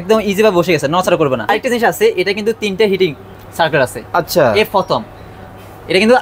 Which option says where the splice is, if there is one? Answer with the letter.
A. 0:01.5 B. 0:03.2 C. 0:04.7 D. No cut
A